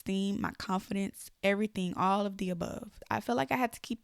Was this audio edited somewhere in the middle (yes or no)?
yes